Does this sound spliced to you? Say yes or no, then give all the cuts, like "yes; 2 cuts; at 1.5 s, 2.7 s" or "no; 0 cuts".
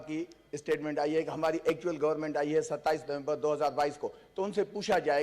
no; 0 cuts